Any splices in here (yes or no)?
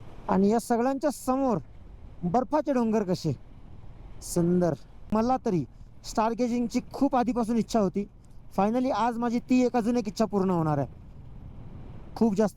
yes